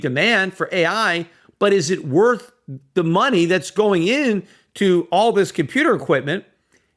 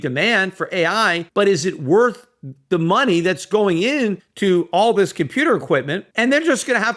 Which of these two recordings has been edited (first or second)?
second